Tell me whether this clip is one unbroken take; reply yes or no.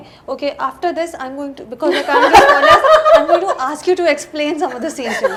yes